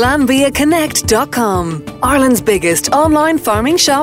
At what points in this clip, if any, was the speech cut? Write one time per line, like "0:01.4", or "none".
0:01.8